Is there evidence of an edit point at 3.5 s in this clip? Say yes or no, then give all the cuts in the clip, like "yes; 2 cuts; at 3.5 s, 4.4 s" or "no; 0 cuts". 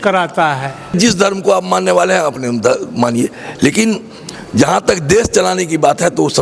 no; 1 cut; at 0.9 s